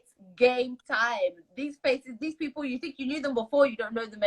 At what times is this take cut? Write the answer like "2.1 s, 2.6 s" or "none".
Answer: none